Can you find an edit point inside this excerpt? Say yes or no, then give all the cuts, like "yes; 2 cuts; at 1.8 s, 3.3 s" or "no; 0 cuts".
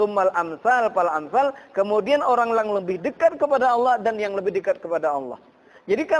no; 0 cuts